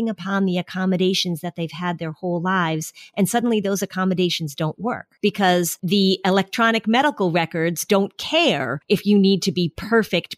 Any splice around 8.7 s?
yes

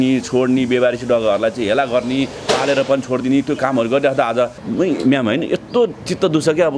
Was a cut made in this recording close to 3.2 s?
no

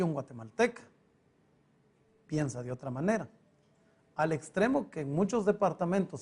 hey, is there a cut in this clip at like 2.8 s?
no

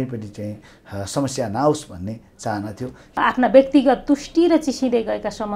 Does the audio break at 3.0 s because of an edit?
yes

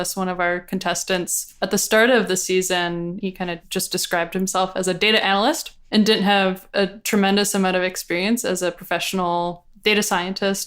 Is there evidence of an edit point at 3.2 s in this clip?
yes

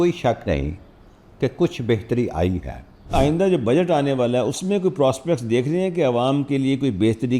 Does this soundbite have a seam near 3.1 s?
yes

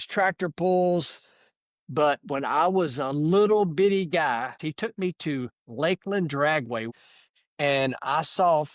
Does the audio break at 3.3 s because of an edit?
no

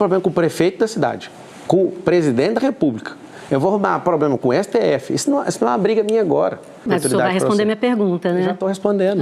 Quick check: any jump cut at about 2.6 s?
no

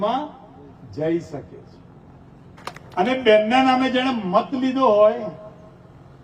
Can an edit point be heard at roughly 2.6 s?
yes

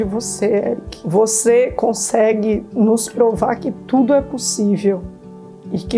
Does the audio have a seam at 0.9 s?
yes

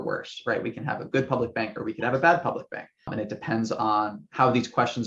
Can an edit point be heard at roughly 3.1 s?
yes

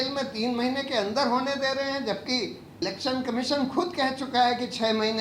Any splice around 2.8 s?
yes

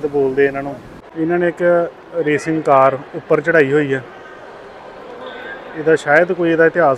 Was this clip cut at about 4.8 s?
no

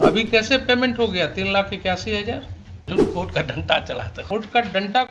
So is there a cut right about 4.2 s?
yes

